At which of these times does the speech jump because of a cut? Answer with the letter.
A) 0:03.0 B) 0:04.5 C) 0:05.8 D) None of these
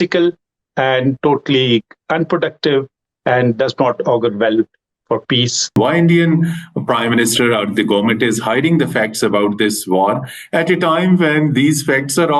C